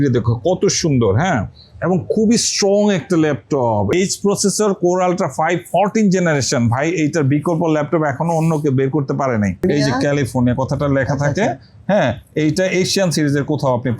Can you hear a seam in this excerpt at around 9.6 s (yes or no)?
yes